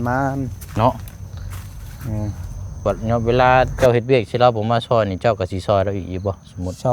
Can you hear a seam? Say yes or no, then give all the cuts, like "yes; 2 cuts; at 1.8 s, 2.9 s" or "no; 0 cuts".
yes; 1 cut; at 2.8 s